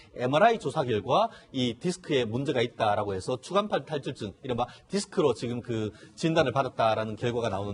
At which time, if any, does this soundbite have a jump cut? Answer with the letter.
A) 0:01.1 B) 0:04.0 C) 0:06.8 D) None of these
B